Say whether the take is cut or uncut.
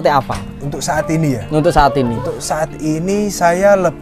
uncut